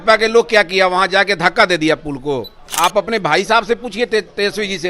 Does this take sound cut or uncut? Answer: cut